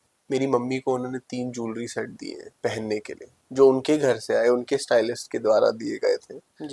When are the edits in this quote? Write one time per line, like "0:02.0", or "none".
0:02.4